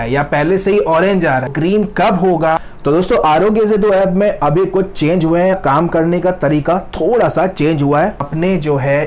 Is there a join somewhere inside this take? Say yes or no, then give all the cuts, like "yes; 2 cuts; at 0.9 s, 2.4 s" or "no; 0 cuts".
yes; 4 cuts; at 1.5 s, 2.7 s, 5.6 s, 8.2 s